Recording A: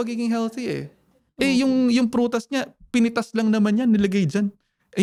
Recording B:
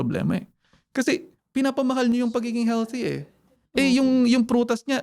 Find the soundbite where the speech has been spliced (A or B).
B